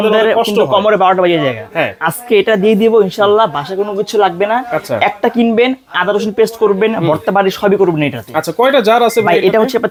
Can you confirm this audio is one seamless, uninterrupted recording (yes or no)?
yes